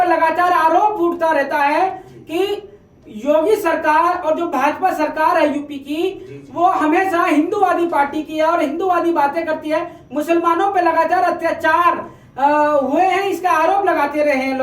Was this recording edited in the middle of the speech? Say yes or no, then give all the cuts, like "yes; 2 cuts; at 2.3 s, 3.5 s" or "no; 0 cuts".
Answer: no; 0 cuts